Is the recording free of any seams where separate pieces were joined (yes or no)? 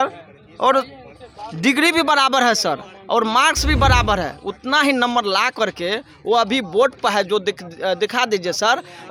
yes